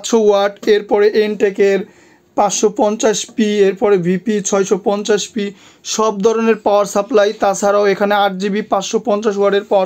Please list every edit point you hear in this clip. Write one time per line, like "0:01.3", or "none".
none